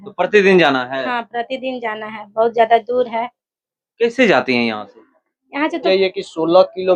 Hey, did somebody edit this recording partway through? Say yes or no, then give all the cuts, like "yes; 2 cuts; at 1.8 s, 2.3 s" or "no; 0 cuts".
yes; 1 cut; at 5.8 s